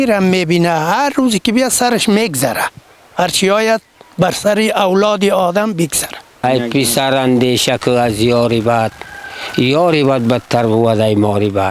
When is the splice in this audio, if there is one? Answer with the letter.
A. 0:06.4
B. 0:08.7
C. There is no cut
A